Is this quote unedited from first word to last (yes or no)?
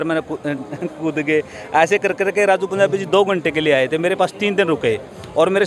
yes